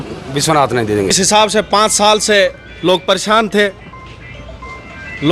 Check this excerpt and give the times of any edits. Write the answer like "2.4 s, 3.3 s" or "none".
1.1 s